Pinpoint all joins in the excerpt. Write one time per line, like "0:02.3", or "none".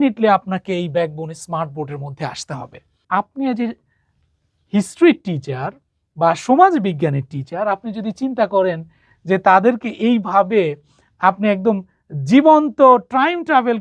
0:03.0